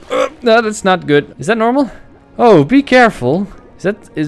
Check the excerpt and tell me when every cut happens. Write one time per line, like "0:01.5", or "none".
0:01.3